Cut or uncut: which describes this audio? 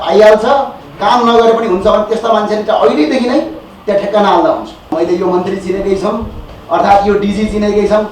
cut